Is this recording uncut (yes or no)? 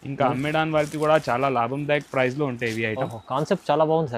yes